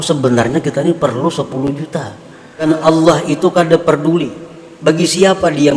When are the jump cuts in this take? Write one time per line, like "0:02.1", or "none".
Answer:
0:02.7

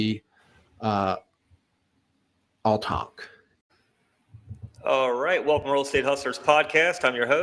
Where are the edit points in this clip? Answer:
0:03.5

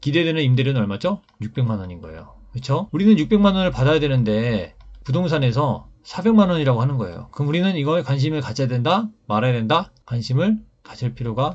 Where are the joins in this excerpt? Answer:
none

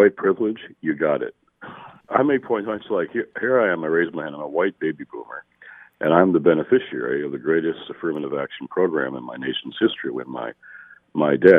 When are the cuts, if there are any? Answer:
0:01.8

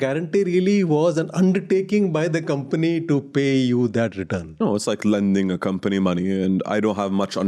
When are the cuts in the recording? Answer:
none

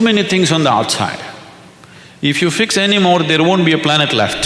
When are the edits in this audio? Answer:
none

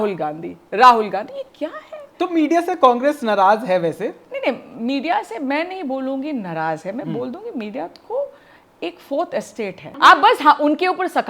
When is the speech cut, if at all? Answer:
0:10.0

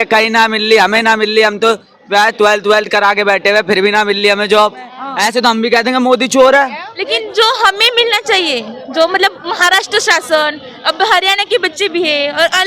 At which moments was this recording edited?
0:05.0
0:06.9

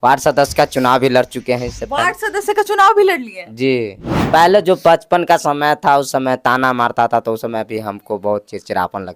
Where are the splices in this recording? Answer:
0:04.1

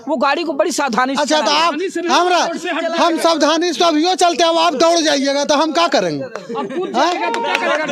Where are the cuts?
none

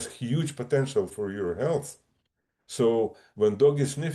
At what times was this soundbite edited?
0:01.1

